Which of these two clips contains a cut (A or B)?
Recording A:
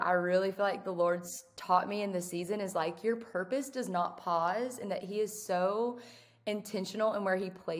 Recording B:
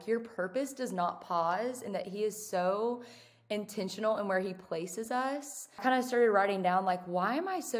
B